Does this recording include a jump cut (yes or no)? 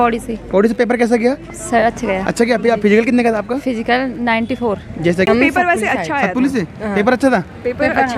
yes